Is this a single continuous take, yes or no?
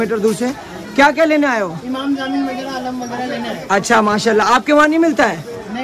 yes